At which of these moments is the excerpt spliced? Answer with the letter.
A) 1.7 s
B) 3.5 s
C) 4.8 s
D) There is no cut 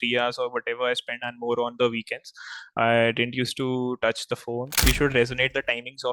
C